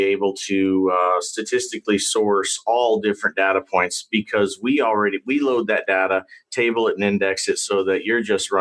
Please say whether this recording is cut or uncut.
uncut